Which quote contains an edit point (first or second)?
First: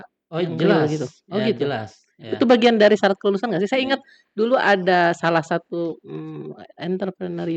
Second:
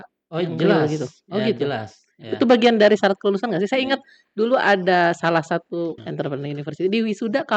second